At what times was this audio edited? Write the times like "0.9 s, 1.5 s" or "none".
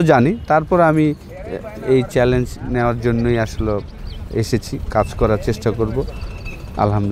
none